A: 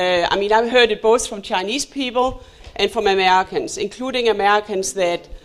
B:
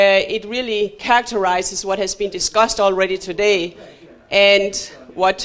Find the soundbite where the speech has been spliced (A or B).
B